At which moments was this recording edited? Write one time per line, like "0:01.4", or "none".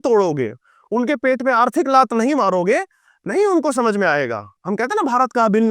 0:04.6

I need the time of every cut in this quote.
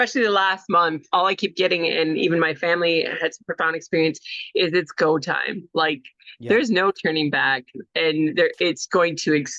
none

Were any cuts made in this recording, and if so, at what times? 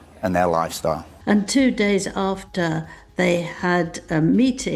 0:01.1

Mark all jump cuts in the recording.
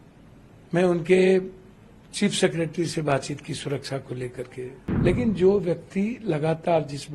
0:04.8

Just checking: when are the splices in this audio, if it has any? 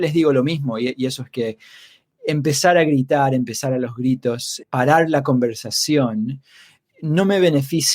0:04.6

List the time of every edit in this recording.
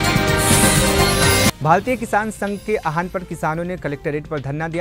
0:01.5

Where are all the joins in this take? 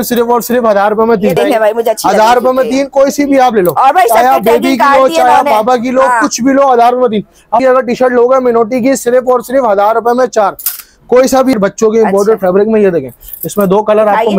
0:01.4
0:07.6
0:11.5

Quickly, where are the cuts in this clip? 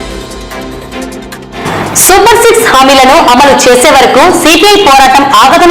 0:01.6

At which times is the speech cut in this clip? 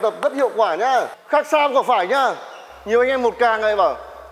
0:01.2

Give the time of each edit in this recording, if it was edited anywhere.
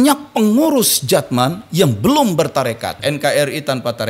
0:03.0

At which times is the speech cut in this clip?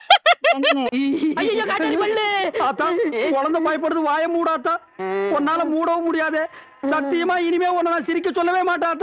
none

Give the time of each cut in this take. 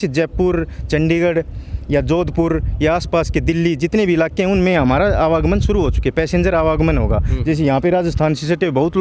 none

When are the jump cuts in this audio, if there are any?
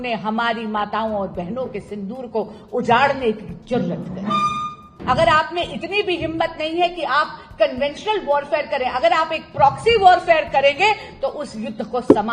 0:04.9

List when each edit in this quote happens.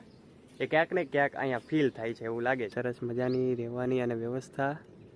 0:02.7

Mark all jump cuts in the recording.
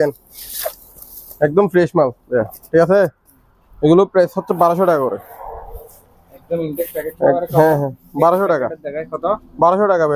none

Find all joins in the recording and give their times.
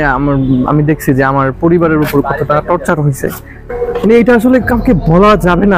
0:03.7

